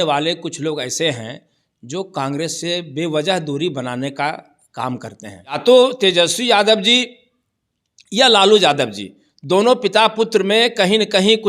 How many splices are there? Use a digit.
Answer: 1